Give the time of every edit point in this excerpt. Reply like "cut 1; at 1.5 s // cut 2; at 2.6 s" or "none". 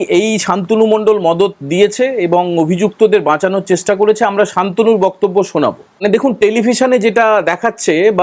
cut 1; at 6.0 s